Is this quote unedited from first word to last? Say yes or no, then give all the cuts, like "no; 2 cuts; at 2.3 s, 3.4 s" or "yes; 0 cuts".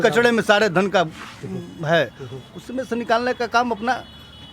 yes; 0 cuts